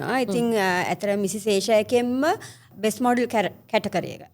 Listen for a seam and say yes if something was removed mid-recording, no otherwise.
yes